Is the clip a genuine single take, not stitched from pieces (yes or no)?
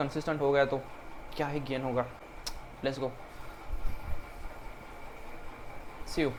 yes